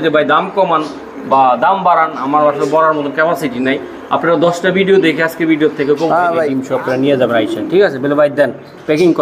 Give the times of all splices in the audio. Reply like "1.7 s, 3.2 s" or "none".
6.6 s